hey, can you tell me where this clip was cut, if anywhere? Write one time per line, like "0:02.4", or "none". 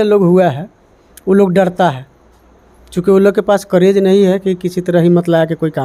none